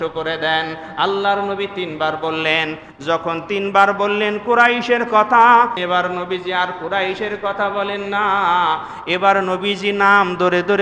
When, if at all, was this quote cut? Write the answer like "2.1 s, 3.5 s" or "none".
none